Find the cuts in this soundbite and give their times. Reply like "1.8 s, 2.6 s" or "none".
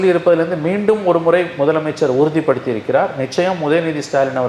none